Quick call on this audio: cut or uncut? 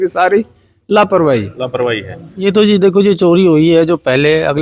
cut